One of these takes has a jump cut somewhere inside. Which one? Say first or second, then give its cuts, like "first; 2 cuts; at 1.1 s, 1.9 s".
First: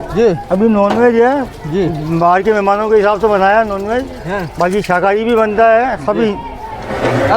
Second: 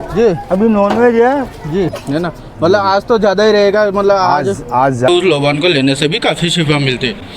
second; 2 cuts; at 2.0 s, 5.1 s